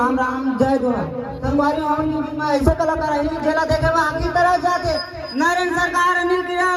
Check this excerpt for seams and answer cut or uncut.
uncut